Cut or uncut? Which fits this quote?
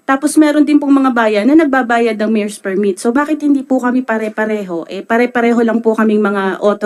uncut